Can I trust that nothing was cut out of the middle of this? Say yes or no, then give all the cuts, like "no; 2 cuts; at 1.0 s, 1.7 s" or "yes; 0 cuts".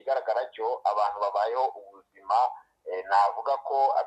yes; 0 cuts